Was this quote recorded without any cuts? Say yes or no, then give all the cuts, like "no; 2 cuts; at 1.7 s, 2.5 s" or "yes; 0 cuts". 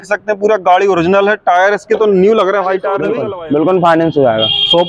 no; 1 cut; at 3.1 s